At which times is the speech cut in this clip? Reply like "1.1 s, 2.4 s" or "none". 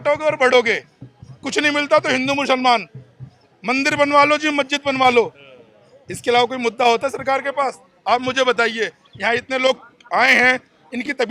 none